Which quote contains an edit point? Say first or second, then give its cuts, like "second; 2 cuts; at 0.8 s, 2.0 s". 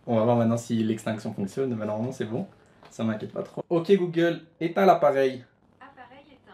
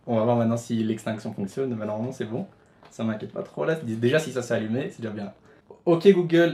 first; 2 cuts; at 3.5 s, 5.6 s